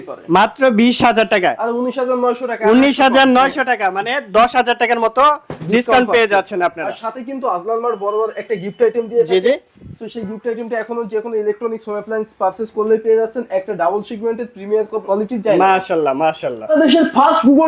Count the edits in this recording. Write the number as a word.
two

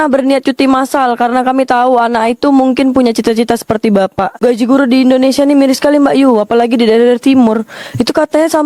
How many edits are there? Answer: zero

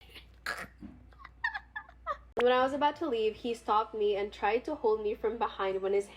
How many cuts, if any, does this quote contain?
one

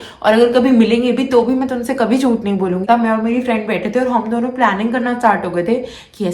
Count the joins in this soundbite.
one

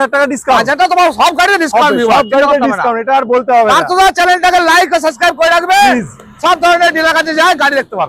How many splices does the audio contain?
zero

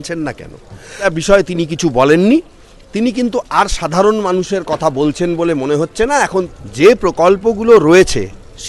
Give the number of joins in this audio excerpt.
two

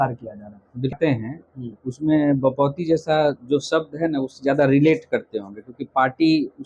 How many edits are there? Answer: one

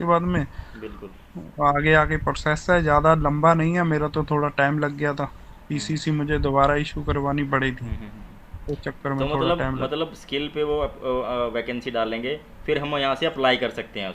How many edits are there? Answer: zero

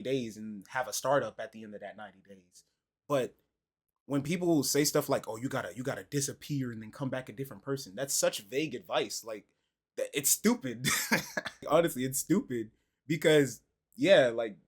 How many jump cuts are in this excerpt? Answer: one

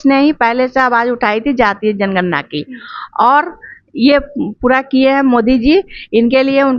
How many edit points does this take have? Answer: zero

